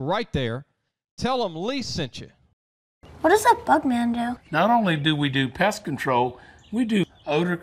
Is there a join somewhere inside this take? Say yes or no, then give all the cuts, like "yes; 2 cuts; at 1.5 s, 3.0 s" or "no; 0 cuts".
yes; 1 cut; at 3.0 s